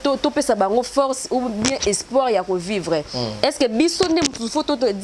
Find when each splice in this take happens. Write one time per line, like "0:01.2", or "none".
none